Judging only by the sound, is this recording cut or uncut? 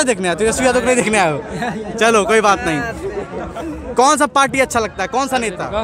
uncut